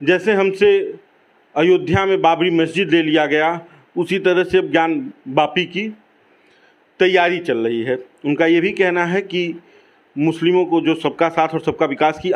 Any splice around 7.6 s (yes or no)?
no